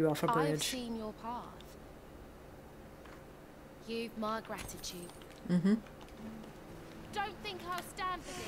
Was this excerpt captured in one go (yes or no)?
no